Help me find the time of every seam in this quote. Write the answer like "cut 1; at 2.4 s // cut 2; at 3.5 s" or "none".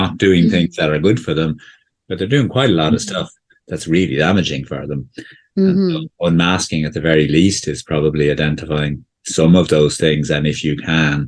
none